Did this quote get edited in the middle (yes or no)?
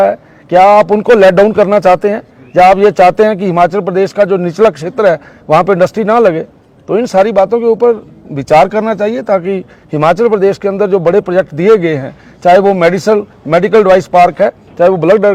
no